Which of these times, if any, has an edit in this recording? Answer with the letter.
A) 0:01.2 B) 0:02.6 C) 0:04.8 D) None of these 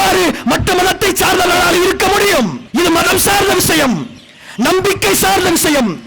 B